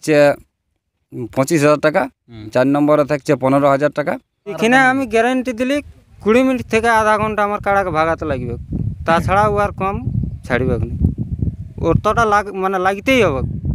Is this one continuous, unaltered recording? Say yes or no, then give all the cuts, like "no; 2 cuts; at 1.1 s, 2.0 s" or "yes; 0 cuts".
no; 2 cuts; at 2.5 s, 4.4 s